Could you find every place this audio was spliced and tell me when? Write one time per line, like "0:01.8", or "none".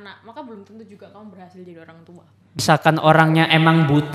0:02.6